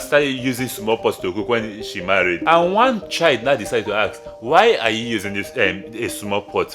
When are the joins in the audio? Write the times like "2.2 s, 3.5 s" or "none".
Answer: 2.4 s